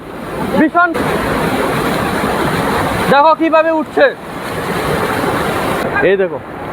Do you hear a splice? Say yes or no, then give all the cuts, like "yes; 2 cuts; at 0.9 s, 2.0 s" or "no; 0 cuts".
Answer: yes; 2 cuts; at 1.0 s, 5.8 s